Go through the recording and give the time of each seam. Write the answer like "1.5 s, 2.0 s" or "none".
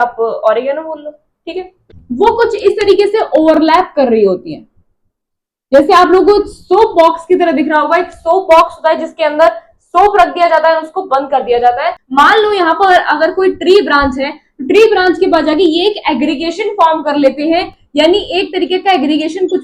1.8 s, 12.0 s